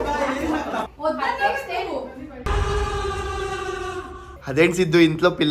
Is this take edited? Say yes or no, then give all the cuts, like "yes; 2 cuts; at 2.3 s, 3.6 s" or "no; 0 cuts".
yes; 1 cut; at 0.9 s